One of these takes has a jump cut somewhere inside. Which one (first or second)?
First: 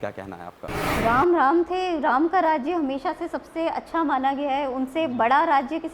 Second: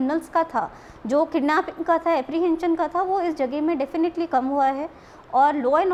first